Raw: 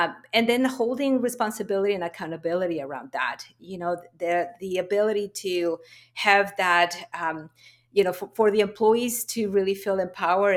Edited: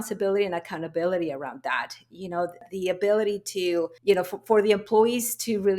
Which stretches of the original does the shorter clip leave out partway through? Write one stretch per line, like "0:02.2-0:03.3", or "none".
0:04.1-0:04.5
0:05.8-0:07.8